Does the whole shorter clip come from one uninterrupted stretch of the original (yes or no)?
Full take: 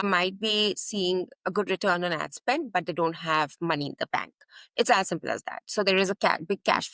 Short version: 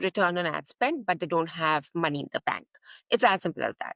yes